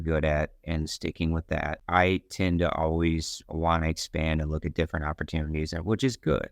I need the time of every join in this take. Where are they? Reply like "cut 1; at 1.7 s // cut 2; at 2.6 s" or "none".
cut 1; at 1.8 s